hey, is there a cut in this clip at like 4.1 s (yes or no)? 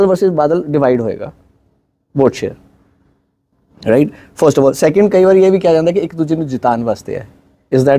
no